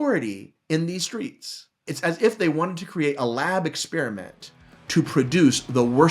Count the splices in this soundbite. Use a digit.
1